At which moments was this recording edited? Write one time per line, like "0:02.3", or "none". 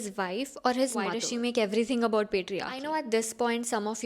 0:01.2
0:02.8